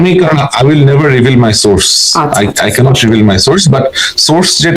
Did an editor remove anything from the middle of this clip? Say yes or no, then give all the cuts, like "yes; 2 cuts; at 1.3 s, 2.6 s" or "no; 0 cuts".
no; 0 cuts